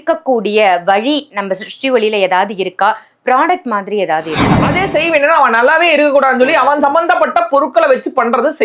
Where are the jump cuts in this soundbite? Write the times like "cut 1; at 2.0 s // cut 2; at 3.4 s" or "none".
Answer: cut 1; at 4.7 s

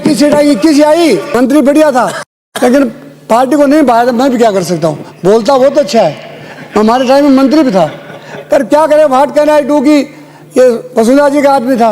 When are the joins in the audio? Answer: cut 1; at 1.3 s

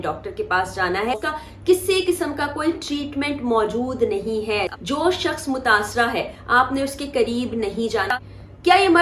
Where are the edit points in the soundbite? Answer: cut 1; at 1.2 s // cut 2; at 4.7 s // cut 3; at 8.1 s

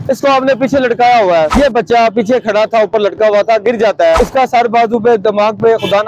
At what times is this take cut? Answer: cut 1; at 1.5 s // cut 2; at 4.2 s

